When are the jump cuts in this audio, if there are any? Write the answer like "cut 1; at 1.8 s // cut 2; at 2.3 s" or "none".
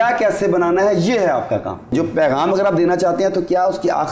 cut 1; at 1.9 s